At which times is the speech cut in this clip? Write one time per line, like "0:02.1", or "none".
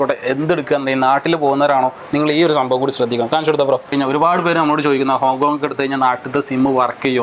0:03.9